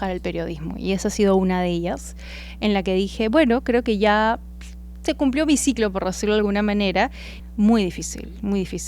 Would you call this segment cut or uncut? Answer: cut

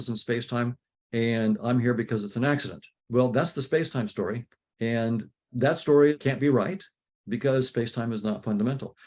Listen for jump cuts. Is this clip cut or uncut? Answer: uncut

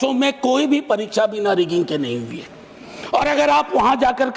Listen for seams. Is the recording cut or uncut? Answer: uncut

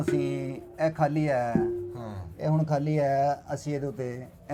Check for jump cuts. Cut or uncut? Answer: uncut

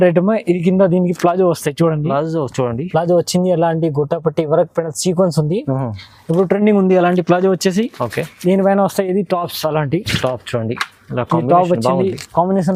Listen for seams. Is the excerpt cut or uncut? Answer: uncut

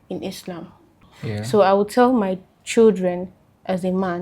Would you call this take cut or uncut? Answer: cut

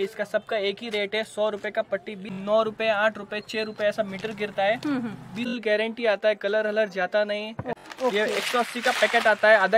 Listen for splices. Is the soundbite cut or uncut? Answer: cut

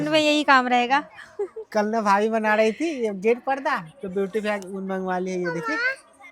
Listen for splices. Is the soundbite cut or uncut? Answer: uncut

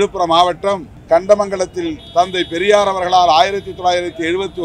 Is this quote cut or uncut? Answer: cut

